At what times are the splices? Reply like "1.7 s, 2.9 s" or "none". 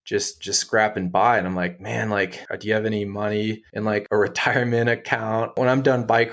2.5 s, 4.0 s, 5.6 s

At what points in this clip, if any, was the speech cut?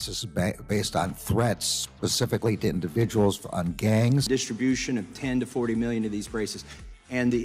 4.2 s

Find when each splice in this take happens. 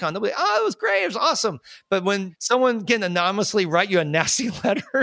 2.0 s

